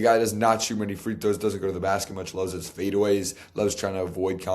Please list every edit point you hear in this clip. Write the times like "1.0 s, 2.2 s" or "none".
none